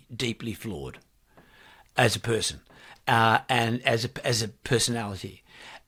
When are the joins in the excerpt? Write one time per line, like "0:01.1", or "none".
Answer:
none